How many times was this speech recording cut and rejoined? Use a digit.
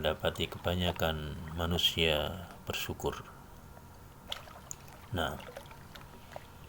0